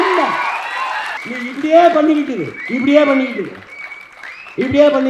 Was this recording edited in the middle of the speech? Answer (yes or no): yes